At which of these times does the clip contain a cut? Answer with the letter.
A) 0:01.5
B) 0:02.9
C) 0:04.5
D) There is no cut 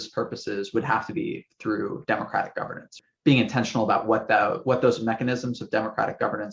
B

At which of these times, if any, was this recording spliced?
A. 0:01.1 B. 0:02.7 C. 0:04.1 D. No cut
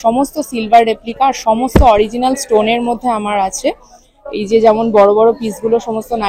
D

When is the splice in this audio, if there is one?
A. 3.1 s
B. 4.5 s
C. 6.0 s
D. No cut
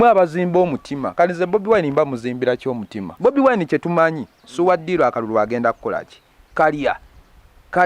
A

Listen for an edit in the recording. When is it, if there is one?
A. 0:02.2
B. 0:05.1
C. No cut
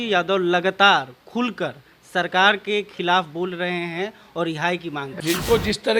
B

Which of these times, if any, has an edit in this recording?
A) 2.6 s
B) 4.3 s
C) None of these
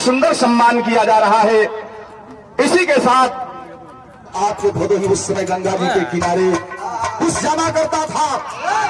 B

